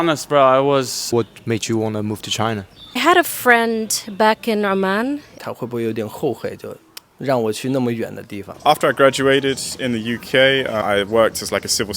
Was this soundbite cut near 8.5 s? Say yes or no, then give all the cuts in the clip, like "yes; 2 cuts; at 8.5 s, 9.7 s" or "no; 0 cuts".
yes; 3 cuts; at 1.0 s, 5.4 s, 8.5 s